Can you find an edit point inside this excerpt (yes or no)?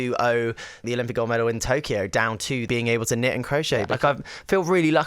yes